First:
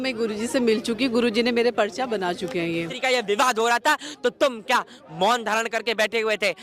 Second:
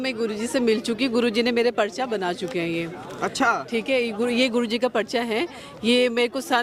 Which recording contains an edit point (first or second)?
first